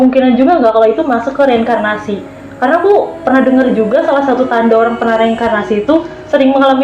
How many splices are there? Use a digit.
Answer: 0